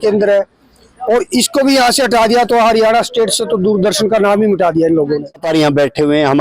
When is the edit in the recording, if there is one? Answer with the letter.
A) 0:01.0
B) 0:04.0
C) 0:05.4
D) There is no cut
C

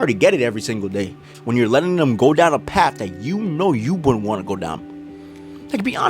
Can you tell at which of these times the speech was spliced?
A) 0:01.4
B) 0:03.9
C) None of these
A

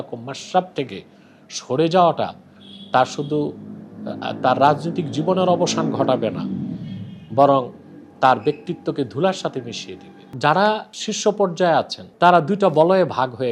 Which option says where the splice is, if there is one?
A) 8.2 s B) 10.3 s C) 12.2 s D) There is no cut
B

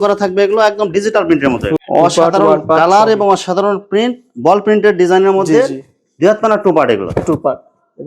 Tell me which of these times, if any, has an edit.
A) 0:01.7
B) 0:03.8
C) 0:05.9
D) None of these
A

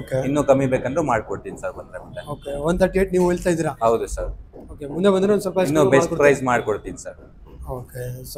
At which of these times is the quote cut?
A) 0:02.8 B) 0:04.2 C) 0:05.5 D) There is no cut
D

